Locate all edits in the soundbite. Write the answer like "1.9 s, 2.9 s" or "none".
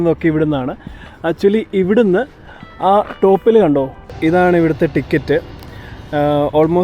4.2 s